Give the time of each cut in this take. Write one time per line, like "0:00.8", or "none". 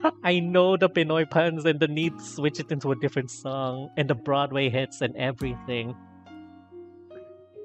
none